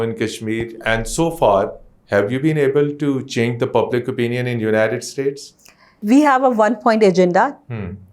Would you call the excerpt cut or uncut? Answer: cut